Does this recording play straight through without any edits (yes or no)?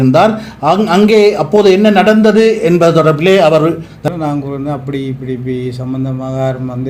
no